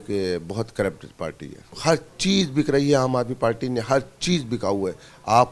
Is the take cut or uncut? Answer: cut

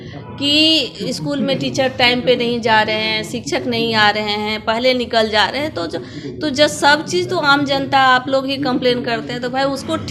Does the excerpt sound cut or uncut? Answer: uncut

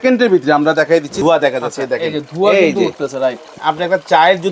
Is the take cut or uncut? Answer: cut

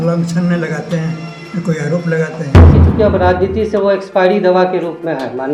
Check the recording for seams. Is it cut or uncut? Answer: cut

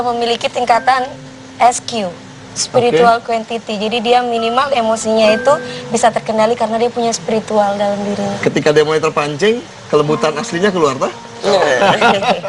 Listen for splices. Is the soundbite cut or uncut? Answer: uncut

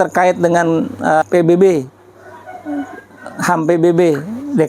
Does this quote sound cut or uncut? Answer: cut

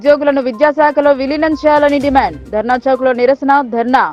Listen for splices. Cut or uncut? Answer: uncut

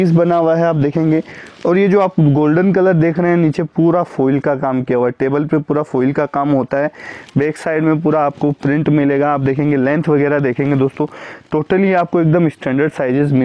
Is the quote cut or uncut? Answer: uncut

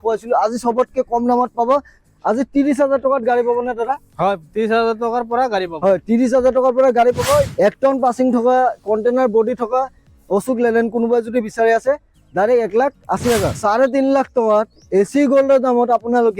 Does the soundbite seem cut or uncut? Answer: cut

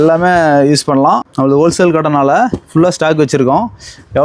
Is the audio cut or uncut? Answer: cut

